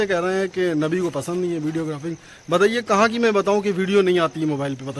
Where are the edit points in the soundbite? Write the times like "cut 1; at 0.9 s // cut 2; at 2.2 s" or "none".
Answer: none